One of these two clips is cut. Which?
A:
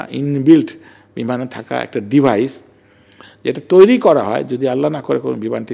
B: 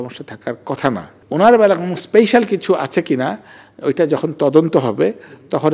B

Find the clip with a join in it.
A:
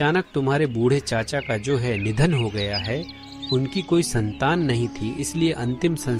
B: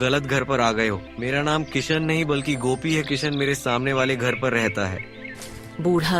B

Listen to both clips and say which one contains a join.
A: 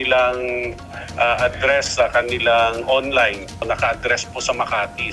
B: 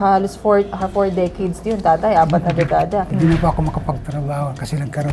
B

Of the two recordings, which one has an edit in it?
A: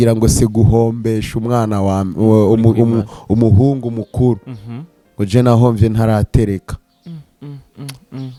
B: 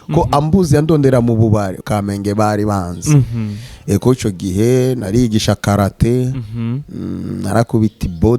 B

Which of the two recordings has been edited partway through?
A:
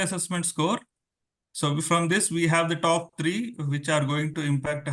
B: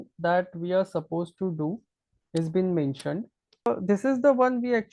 B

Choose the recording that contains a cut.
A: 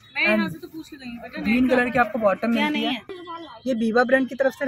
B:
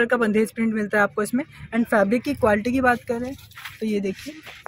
A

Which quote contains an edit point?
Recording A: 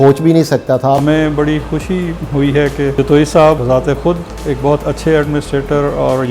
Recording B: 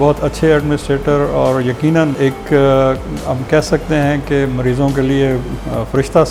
A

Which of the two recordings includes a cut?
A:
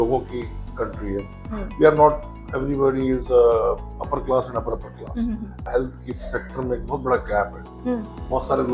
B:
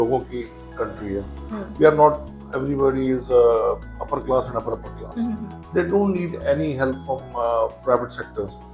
A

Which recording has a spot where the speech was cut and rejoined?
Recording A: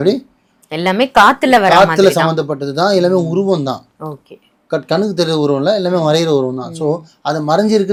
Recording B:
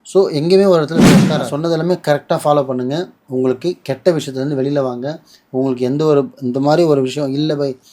B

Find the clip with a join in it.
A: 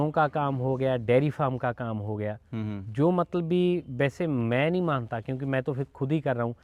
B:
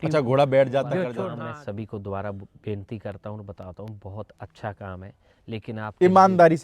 B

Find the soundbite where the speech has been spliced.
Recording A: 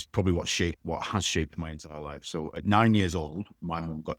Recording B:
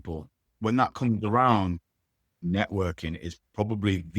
B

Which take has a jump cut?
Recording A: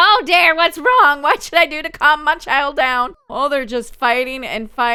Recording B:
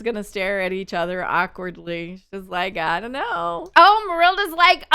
B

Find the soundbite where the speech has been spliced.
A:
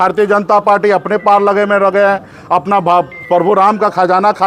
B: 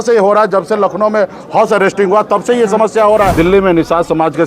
B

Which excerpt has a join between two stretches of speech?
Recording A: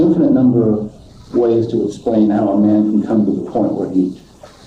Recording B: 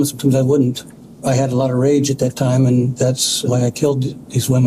B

